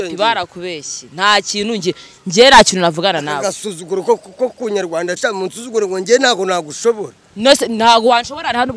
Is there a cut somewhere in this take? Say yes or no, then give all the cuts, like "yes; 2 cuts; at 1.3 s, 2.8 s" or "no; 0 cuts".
yes; 1 cut; at 5.2 s